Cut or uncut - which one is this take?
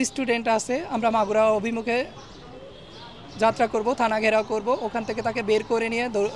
uncut